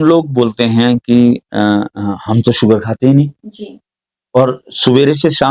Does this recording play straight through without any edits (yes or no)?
yes